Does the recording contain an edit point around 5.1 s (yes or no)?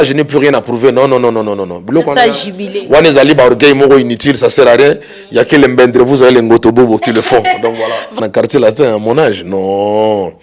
no